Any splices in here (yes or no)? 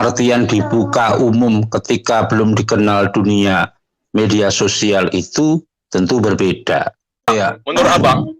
yes